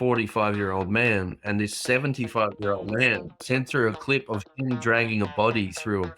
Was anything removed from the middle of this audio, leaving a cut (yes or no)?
yes